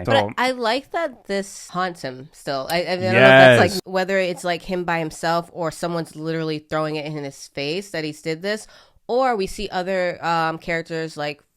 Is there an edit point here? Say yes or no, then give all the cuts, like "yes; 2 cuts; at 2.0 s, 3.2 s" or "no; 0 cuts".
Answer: yes; 2 cuts; at 1.6 s, 3.8 s